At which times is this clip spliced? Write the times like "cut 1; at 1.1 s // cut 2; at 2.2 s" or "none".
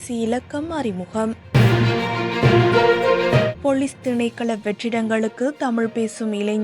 cut 1; at 1.4 s // cut 2; at 3.5 s

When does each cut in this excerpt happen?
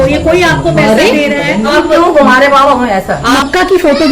cut 1; at 1.7 s // cut 2; at 3.3 s

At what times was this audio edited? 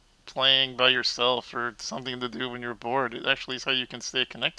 none

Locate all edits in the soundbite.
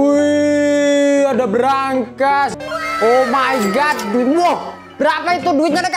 cut 1; at 2.5 s

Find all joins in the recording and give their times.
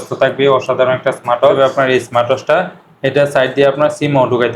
cut 1; at 1.6 s

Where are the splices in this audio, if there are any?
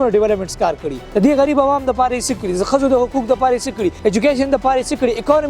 cut 1; at 0.9 s // cut 2; at 4.0 s

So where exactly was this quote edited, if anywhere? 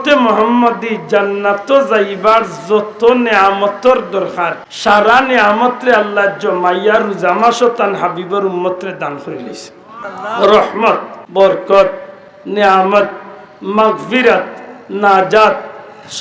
cut 1; at 4.6 s // cut 2; at 10.0 s // cut 3; at 11.2 s

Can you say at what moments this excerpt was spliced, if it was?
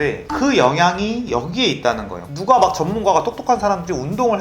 cut 1; at 2.2 s

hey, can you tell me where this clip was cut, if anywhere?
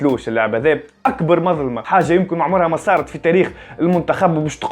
cut 1; at 1.9 s

